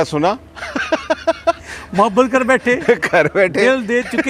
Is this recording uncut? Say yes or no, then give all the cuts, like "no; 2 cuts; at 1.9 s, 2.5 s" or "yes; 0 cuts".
yes; 0 cuts